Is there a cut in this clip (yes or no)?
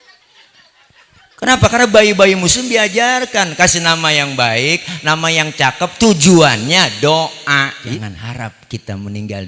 yes